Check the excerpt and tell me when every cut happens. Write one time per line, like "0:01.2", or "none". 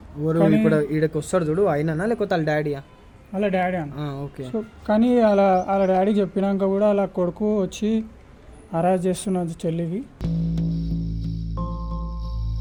none